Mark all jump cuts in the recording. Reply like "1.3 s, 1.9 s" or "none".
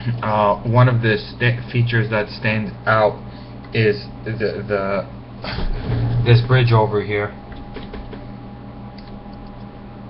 3.6 s